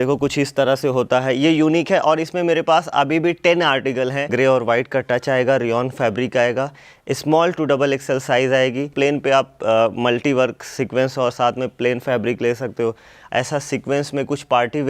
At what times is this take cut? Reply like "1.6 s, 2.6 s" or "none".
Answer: 4.3 s, 8.9 s, 13.2 s